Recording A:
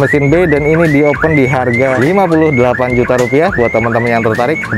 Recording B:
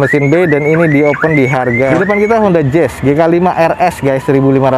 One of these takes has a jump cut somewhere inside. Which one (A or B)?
B